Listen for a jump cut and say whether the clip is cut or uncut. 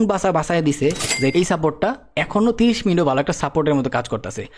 cut